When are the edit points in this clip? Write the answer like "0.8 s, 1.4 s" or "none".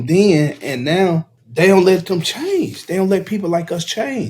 1.4 s